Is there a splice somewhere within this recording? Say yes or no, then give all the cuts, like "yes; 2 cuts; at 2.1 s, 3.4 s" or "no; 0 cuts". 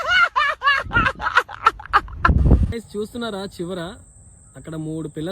yes; 1 cut; at 2.7 s